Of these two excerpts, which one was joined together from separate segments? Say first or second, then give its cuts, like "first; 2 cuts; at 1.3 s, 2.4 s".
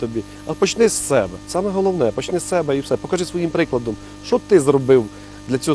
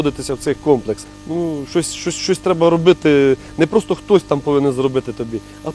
second; 1 cut; at 1.1 s